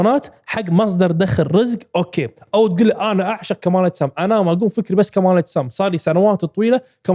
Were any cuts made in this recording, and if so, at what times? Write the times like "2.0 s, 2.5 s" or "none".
none